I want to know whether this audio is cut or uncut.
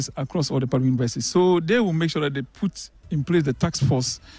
uncut